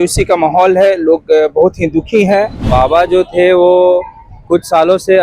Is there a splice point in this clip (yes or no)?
yes